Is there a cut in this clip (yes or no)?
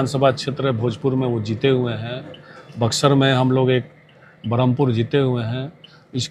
no